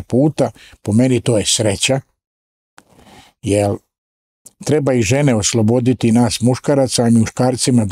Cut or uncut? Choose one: uncut